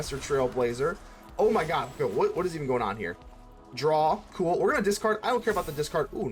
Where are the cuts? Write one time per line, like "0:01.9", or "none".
none